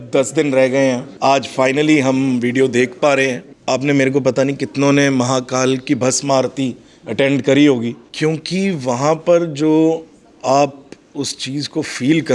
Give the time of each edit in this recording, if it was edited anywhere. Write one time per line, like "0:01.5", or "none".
0:01.1
0:03.5
0:08.0